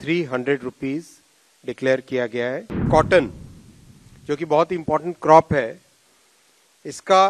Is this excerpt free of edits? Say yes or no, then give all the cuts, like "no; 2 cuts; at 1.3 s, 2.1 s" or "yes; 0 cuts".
no; 1 cut; at 2.8 s